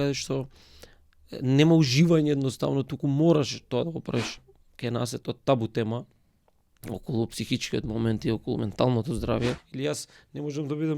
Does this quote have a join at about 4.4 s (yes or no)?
yes